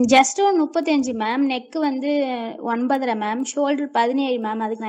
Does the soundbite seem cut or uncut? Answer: uncut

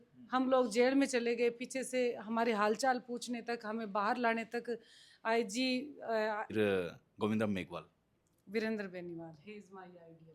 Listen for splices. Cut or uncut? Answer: cut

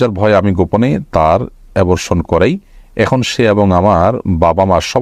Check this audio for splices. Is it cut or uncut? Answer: uncut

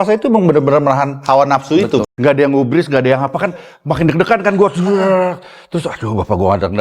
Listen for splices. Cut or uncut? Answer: cut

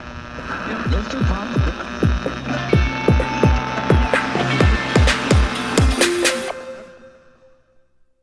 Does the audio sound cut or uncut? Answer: cut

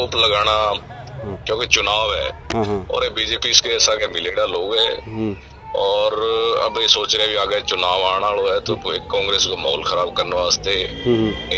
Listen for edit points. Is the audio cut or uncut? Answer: uncut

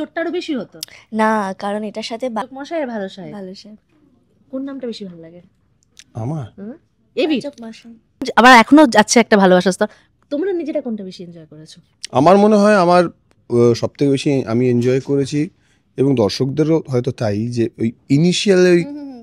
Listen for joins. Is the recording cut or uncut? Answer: cut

